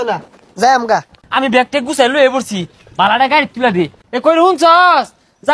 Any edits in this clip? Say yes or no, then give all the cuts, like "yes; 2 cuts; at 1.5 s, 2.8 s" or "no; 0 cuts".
yes; 2 cuts; at 1.2 s, 4.0 s